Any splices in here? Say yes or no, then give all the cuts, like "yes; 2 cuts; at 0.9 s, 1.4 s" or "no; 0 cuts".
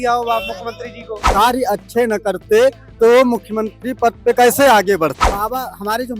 yes; 2 cuts; at 1.3 s, 5.3 s